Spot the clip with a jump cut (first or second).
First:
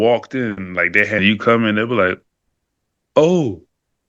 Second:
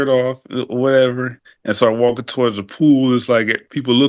first